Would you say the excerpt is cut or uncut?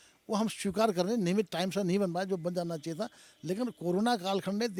uncut